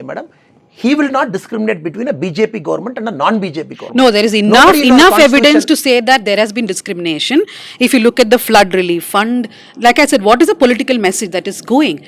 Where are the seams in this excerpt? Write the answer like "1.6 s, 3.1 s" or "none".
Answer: none